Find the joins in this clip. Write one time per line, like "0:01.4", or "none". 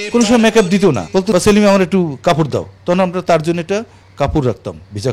0:01.1